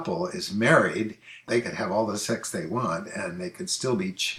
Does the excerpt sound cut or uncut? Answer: uncut